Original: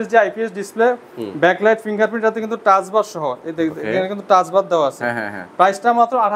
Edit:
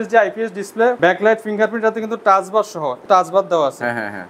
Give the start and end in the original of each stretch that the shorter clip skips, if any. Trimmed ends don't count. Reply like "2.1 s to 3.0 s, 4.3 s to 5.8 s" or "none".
1.0 s to 1.4 s, 3.4 s to 4.2 s

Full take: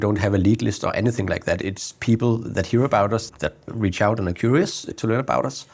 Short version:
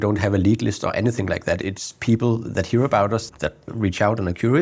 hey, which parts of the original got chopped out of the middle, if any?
none

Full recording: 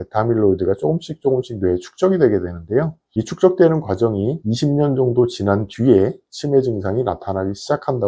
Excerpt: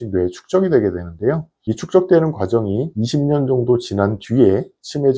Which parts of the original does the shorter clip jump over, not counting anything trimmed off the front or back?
none

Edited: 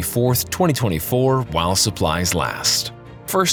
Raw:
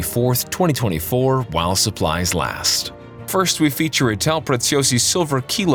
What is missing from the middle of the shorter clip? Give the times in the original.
none

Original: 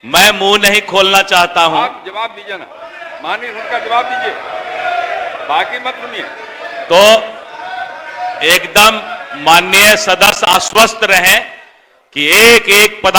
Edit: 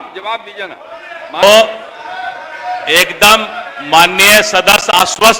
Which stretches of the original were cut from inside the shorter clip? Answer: 3.3 s to 7.0 s

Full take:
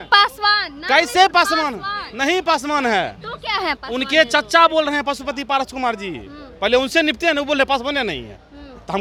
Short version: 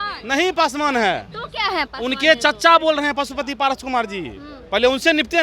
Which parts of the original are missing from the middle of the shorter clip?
none

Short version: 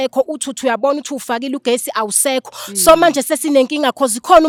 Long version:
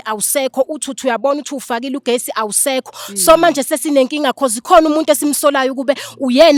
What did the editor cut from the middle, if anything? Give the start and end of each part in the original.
none

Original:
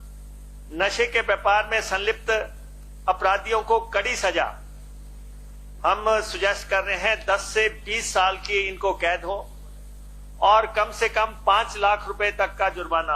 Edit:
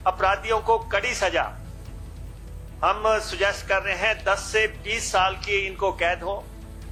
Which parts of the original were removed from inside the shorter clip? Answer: none

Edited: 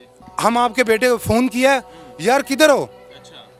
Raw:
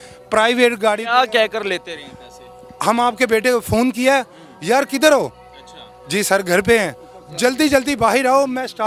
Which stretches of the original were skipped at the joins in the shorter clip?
none

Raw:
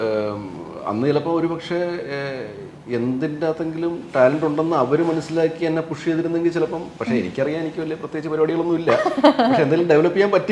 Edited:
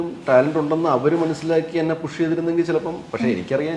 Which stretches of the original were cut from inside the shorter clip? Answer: none

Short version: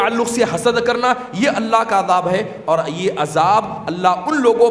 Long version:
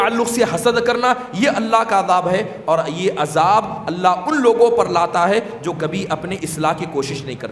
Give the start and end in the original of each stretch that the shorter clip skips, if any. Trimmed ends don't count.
none

